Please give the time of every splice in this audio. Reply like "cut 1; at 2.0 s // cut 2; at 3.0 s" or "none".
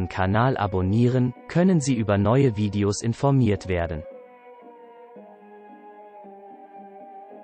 cut 1; at 4.0 s